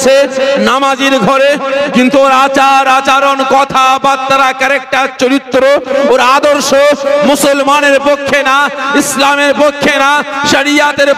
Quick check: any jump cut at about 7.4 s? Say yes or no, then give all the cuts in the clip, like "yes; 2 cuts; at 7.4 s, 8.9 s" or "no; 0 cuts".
no; 0 cuts